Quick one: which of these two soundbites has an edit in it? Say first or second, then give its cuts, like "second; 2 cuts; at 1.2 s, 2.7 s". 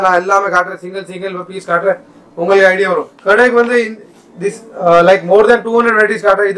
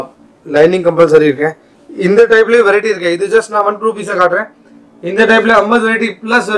first; 1 cut; at 3.1 s